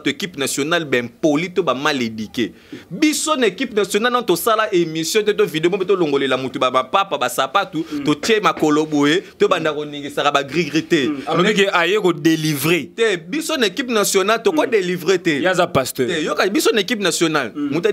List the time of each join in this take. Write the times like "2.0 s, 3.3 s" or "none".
none